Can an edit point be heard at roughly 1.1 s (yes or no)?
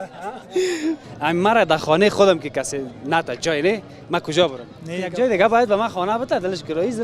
yes